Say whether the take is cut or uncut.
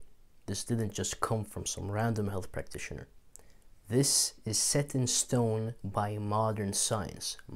uncut